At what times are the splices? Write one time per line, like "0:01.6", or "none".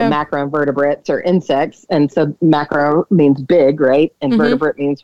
none